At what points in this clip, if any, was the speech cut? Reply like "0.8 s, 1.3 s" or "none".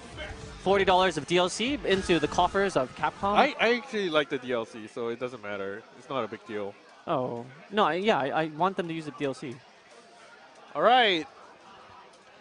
none